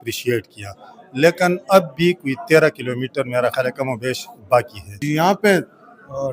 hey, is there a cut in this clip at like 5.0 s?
yes; 1 cut; at 5.0 s

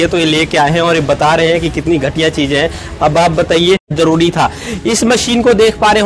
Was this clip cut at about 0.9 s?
no; 1 cut; at 3.9 s

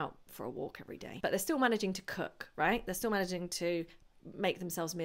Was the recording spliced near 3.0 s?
no; 1 cut; at 1.1 s

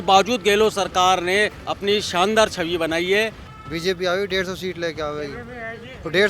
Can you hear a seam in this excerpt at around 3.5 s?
yes; 1 cut; at 3.5 s

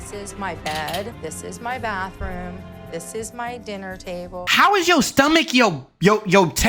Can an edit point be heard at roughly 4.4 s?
yes; 1 cut; at 4.4 s

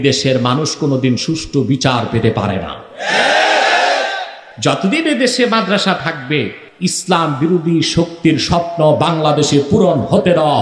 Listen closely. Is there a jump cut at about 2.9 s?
no; 2 cuts; at 4.4 s, 6.6 s

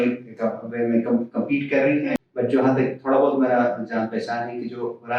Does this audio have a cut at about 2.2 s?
yes; 1 cut; at 2.2 s

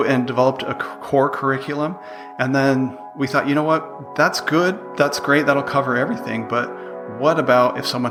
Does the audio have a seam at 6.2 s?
no; 0 cuts

